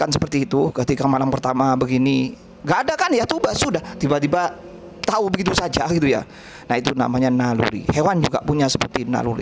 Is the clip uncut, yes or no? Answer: yes